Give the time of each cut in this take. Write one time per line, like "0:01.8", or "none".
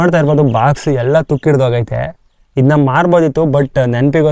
none